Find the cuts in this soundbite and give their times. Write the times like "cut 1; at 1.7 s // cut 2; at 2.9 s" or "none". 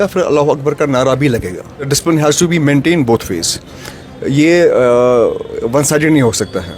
cut 1; at 1.9 s